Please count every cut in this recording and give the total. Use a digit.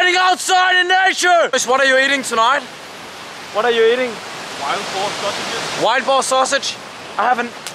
1